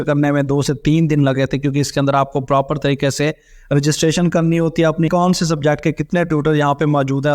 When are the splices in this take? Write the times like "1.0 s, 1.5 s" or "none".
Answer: 5.1 s